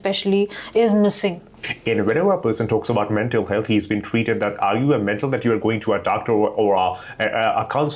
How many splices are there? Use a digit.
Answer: 1